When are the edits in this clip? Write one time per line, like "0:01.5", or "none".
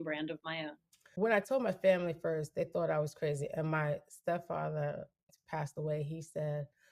0:01.0
0:05.2